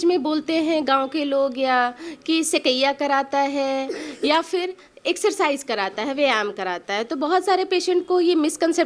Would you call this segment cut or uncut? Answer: uncut